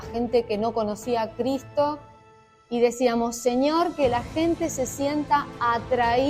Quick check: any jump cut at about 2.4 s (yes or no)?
yes